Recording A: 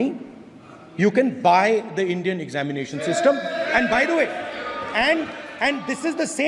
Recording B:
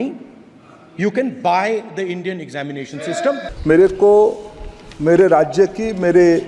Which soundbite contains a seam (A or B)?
B